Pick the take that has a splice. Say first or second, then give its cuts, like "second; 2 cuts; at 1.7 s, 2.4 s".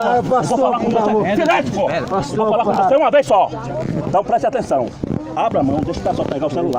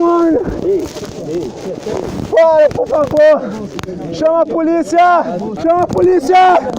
second; 1 cut; at 5.5 s